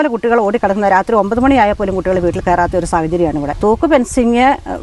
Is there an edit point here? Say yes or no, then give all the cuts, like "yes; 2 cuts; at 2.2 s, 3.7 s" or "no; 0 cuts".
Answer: yes; 1 cut; at 3.5 s